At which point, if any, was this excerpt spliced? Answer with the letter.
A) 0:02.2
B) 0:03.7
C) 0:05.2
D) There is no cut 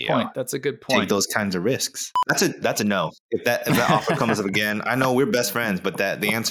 A